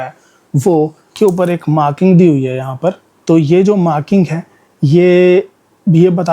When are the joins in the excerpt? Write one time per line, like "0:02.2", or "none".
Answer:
0:01.0